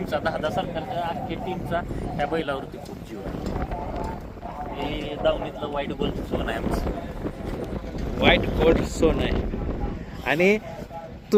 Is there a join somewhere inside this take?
no; 0 cuts

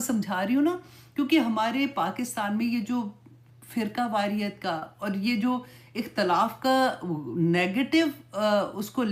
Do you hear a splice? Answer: no; 0 cuts

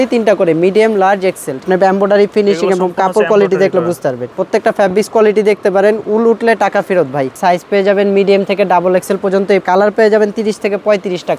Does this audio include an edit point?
yes; 4 cuts; at 1.6 s, 4.3 s, 7.4 s, 9.6 s

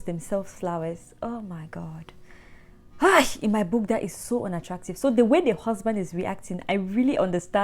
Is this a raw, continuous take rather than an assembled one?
yes; 0 cuts

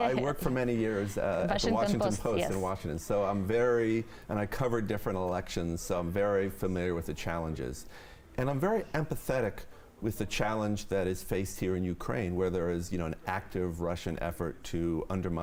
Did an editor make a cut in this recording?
no; 0 cuts

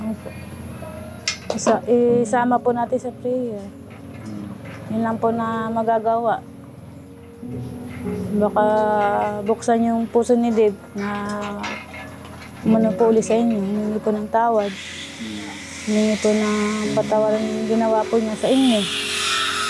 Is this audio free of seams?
yes; 0 cuts

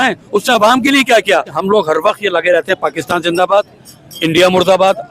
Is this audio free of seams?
no; 1 cut; at 1.5 s

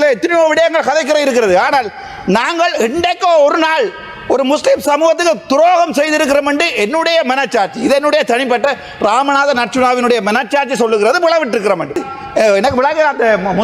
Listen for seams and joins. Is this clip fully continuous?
no; 1 cut; at 12.1 s

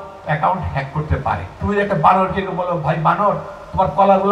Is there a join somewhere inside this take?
yes; 1 cut; at 1.5 s

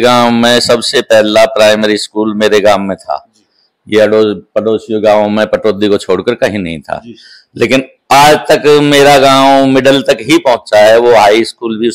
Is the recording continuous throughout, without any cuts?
yes; 0 cuts

